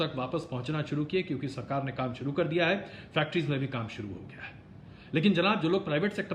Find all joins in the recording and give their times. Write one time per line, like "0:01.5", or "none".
none